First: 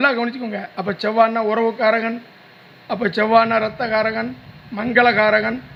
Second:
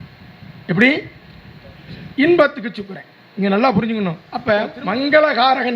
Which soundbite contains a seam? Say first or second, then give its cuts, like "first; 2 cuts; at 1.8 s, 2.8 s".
second; 1 cut; at 4.3 s